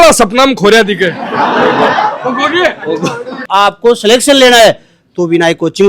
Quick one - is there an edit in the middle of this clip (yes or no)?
yes